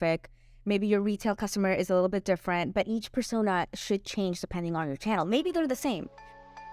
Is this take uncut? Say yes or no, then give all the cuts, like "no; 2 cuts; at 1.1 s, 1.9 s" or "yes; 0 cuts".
yes; 0 cuts